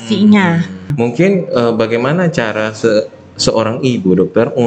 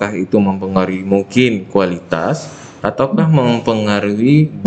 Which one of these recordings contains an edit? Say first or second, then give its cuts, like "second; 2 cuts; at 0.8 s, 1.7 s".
first; 1 cut; at 0.9 s